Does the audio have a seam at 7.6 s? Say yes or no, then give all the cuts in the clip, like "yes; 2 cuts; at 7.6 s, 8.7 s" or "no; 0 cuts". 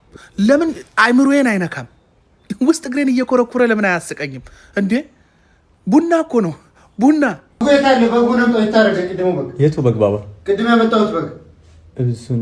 yes; 1 cut; at 7.6 s